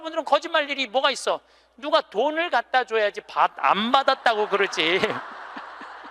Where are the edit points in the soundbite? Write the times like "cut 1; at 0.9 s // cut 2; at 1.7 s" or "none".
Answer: none

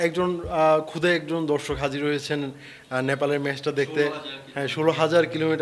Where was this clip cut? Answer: none

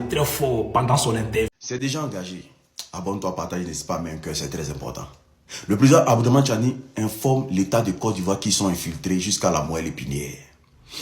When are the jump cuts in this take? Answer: cut 1; at 1.6 s

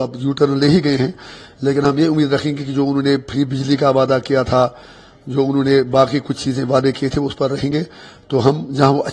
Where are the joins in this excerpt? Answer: none

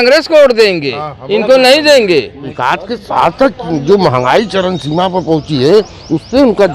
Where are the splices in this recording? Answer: cut 1; at 2.4 s

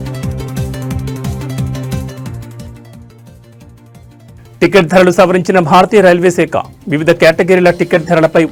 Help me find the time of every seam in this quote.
none

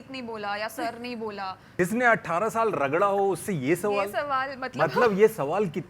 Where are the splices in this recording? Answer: cut 1; at 1.6 s

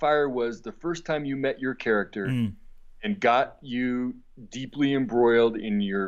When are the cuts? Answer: none

